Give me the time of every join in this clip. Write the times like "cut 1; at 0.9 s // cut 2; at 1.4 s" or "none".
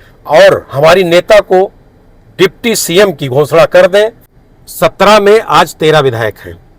cut 1; at 4.3 s